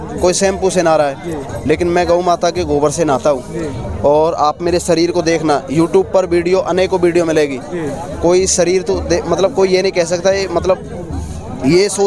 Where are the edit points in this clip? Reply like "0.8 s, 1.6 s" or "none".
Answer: none